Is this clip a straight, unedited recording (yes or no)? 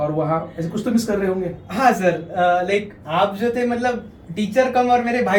yes